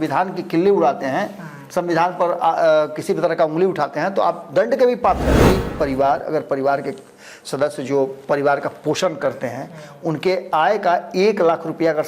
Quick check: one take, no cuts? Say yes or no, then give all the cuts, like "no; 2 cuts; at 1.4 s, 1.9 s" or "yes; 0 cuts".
no; 1 cut; at 5.4 s